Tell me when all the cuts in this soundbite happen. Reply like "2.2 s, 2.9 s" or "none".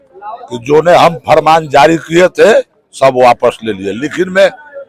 none